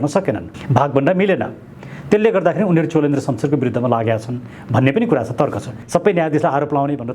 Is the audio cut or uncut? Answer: cut